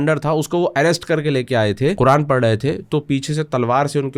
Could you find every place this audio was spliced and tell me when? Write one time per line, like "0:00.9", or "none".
0:02.0